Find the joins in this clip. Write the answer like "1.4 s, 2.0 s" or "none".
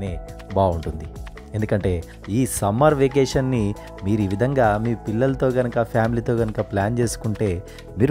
2.1 s